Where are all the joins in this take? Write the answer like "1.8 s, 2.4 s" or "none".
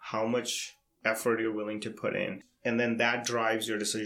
2.4 s